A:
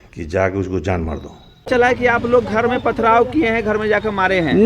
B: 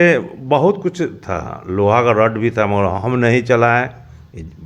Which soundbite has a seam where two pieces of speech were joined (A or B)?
A